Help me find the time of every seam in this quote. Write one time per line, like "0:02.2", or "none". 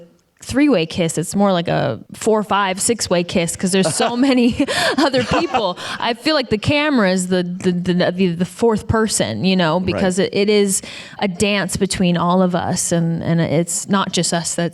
0:02.1